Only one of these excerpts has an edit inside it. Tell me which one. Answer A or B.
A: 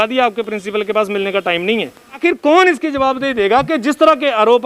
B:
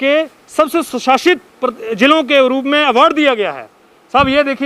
A